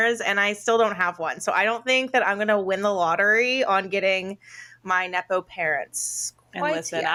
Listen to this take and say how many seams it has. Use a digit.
0